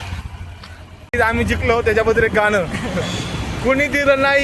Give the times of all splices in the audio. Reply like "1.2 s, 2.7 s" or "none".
1.1 s